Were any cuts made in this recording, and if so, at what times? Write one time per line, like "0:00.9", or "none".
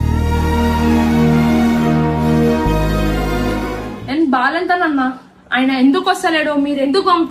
none